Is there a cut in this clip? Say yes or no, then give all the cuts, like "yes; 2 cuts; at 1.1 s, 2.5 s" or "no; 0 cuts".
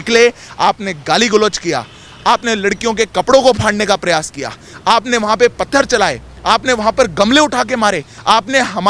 no; 0 cuts